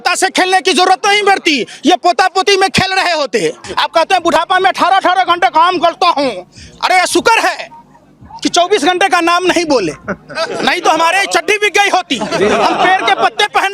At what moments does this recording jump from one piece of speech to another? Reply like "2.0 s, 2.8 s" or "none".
3.6 s